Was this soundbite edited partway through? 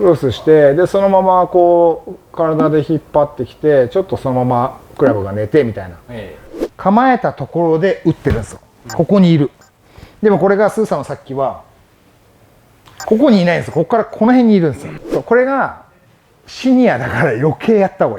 yes; 2 cuts; at 6.5 s, 14.9 s

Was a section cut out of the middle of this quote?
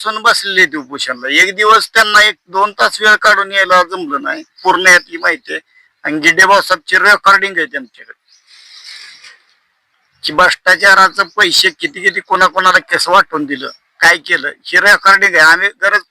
yes; 1 cut; at 4.6 s

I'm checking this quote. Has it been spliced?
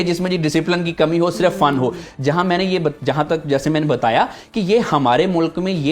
no; 0 cuts

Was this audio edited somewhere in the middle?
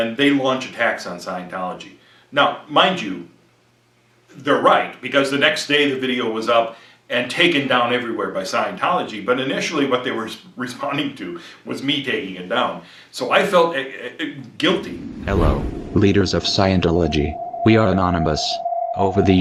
no; 0 cuts

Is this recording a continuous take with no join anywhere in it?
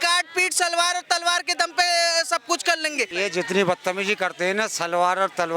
no; 1 cut; at 3.1 s

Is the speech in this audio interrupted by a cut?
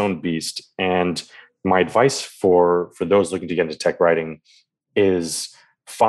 no; 0 cuts

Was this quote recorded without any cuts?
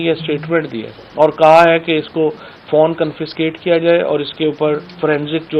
yes; 0 cuts

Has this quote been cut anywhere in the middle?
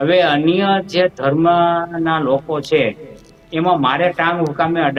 no; 0 cuts

